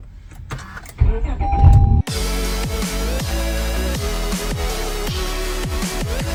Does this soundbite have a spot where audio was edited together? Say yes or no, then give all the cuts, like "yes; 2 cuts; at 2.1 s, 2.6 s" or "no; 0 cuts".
no; 0 cuts